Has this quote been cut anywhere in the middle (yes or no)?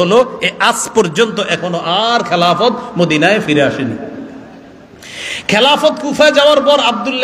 no